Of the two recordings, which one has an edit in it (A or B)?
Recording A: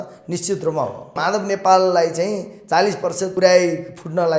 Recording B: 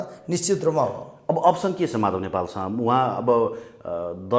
A